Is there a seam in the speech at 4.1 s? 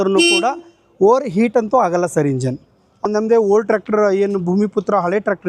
no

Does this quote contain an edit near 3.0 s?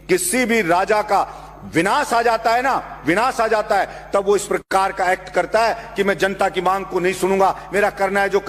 no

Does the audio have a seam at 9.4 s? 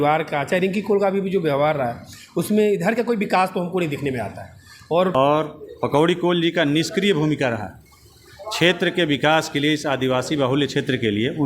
no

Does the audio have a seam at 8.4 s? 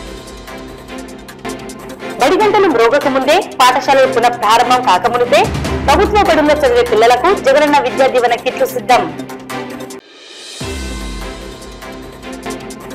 no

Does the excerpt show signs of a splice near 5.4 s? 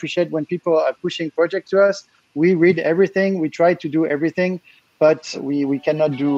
yes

